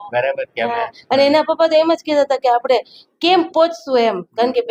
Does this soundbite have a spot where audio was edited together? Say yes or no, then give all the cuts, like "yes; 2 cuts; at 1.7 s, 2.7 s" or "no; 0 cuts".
no; 0 cuts